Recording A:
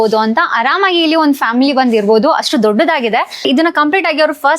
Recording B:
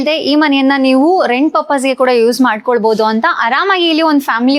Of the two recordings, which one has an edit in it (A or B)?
A